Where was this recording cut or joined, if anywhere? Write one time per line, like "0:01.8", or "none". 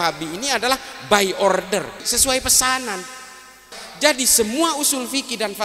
0:02.1
0:03.8

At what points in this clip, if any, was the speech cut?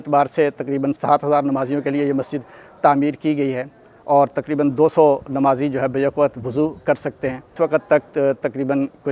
0:01.0
0:07.4

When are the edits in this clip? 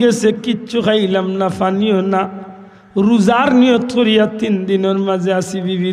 none

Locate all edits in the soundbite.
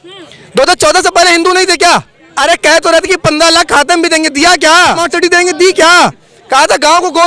0:02.2
0:05.0

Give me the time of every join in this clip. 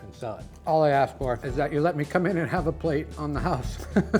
none

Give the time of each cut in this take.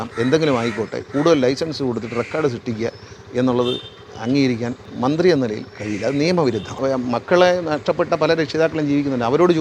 0:04.8
0:06.8

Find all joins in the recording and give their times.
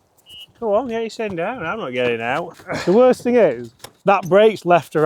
0:02.6

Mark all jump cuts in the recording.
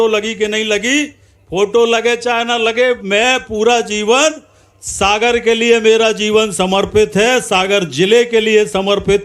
none

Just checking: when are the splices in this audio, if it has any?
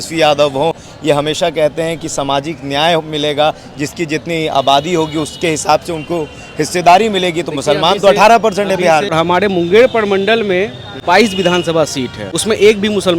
0:09.1
0:10.9
0:12.2

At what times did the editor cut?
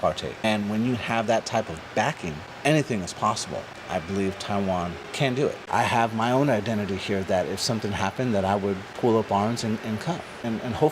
0:05.6

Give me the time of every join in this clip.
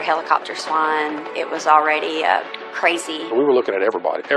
0:03.1

